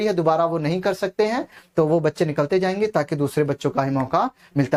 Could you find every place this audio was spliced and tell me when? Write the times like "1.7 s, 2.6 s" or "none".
none